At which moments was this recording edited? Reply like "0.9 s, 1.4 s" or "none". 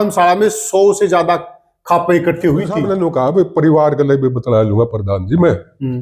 2.8 s